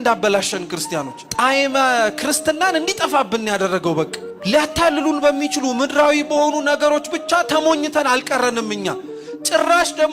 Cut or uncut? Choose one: cut